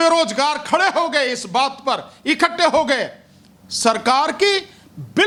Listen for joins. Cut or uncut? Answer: uncut